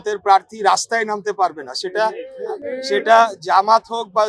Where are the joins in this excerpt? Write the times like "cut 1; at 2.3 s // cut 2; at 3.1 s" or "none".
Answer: none